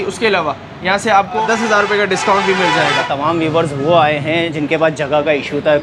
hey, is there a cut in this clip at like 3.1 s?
yes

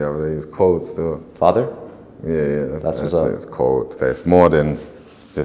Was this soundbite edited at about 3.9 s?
yes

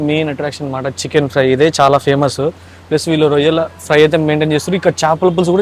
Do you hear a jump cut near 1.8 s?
no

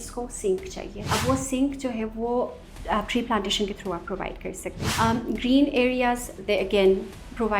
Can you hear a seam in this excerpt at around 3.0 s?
no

